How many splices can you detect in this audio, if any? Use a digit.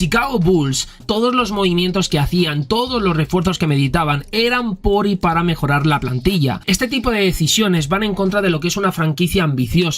2